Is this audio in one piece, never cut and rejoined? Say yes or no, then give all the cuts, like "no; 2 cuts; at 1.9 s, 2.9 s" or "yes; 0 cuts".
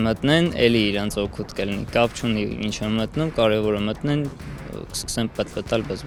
yes; 0 cuts